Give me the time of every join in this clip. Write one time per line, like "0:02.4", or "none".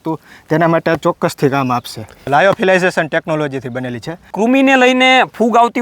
0:02.2
0:04.3